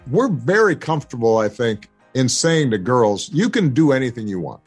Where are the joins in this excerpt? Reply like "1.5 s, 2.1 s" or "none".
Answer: 1.9 s